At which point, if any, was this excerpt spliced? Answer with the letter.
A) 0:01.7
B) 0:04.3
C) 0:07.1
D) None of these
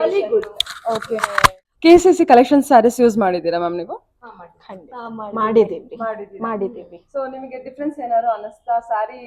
A